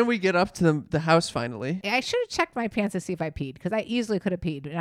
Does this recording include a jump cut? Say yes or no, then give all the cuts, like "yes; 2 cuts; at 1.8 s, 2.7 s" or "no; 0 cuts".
yes; 1 cut; at 1.8 s